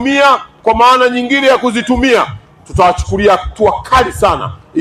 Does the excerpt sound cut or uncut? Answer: uncut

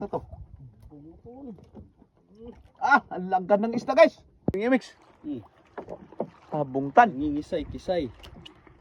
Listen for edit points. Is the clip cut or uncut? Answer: uncut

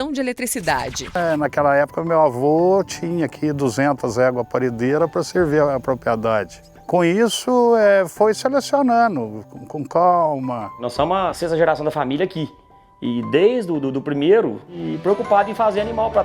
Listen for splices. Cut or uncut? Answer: cut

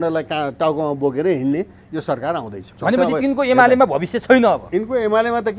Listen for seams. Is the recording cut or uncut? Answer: cut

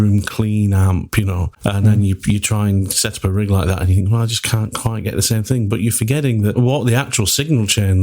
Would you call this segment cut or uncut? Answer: cut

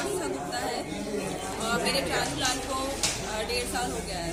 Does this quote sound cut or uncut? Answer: uncut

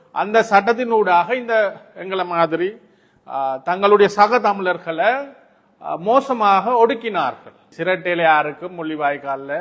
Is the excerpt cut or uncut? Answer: cut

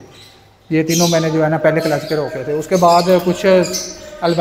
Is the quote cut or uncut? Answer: uncut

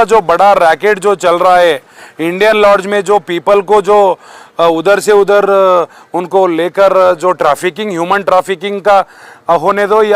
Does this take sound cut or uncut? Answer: uncut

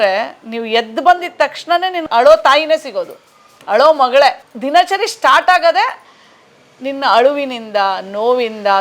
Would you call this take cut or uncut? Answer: cut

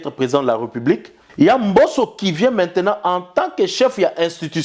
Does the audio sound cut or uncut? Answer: cut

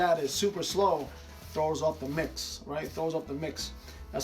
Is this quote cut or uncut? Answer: uncut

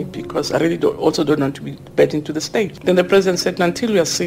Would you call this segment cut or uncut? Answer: cut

